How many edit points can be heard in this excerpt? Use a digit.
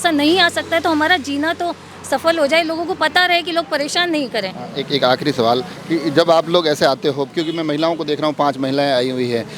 0